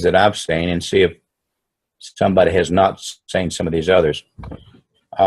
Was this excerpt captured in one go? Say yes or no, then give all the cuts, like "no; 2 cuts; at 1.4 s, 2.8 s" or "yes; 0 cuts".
no; 1 cut; at 4.3 s